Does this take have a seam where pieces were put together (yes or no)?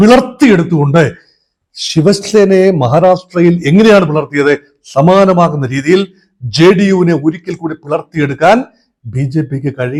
no